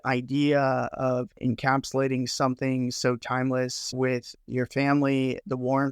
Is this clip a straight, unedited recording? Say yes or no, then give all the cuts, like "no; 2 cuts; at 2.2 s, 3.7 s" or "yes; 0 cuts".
no; 1 cut; at 1.3 s